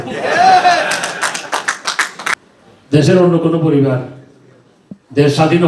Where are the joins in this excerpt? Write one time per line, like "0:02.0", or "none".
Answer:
0:02.4